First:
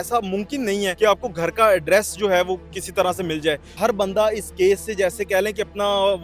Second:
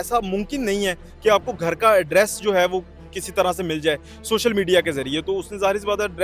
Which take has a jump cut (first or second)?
first